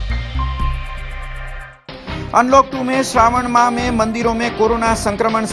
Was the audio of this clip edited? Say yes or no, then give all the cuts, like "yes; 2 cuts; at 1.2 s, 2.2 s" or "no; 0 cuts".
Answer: yes; 1 cut; at 1.7 s